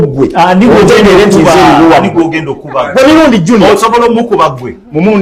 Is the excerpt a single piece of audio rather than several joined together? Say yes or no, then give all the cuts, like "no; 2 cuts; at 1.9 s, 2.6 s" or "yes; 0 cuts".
yes; 0 cuts